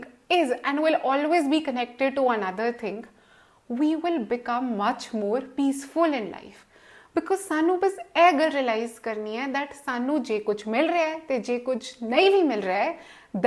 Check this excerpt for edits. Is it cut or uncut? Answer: uncut